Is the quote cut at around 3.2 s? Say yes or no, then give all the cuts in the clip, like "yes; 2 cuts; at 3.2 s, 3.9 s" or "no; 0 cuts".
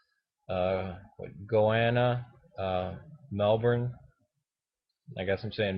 yes; 1 cut; at 3.2 s